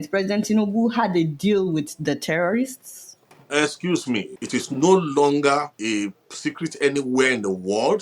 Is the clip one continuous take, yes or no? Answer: no